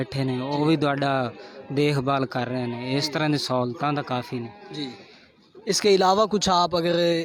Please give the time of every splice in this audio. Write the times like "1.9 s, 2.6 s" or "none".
none